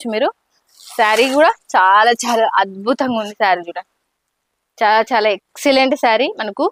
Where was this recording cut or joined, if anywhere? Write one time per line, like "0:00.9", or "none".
none